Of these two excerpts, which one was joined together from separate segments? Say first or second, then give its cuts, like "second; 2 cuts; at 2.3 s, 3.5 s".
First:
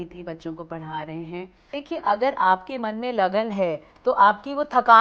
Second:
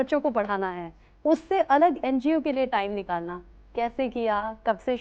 first; 1 cut; at 1.7 s